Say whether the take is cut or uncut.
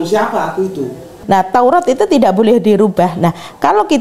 cut